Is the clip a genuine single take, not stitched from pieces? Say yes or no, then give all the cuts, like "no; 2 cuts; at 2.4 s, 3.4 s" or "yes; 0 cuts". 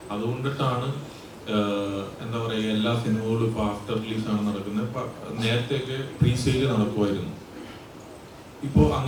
yes; 0 cuts